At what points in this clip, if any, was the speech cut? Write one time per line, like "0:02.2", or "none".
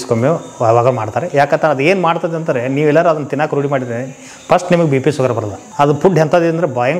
0:05.6